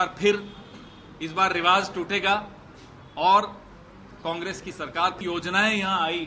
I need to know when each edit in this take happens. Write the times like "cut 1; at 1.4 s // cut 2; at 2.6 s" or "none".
cut 1; at 5.2 s